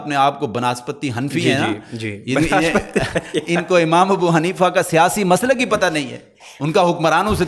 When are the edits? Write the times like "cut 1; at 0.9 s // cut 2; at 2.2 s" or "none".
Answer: none